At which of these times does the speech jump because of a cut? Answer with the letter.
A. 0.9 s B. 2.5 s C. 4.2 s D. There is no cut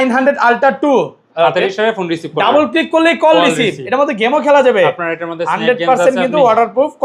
D